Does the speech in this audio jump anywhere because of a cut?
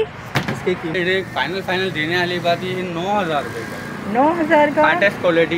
yes; 1 cut; at 0.9 s

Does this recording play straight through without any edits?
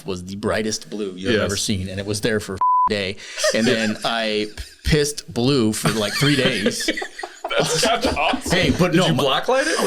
yes; 0 cuts

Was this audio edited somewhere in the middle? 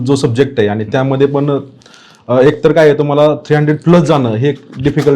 no; 0 cuts

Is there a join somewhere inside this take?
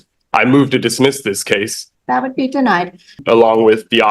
yes; 2 cuts; at 1.8 s, 3.2 s

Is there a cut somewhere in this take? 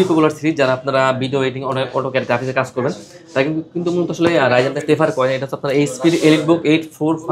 no; 0 cuts

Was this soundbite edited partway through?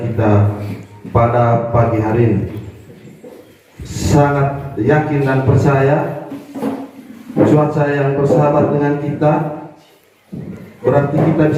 no; 0 cuts

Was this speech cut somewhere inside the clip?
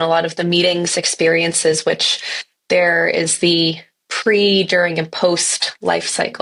no; 0 cuts

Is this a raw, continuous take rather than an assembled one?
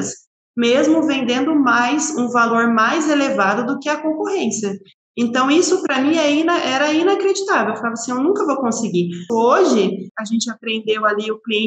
no; 2 cuts; at 9.2 s, 10.1 s

